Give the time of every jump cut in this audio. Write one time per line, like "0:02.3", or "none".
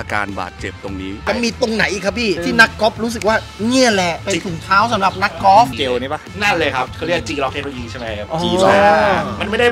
0:01.3
0:02.5
0:04.2